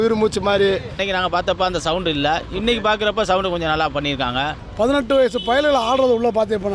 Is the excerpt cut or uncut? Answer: cut